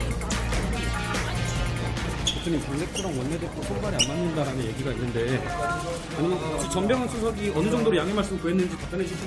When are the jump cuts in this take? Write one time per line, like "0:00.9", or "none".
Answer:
none